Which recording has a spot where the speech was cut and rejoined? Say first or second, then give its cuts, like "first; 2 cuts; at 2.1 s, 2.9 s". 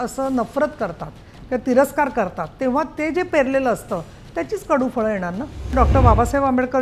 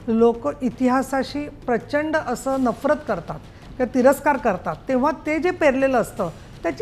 first; 1 cut; at 5.7 s